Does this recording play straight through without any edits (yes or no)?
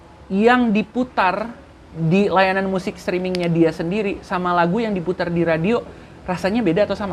yes